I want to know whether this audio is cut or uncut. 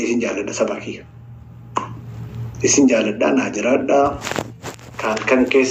uncut